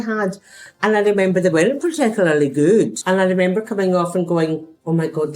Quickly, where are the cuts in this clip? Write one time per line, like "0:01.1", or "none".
0:03.0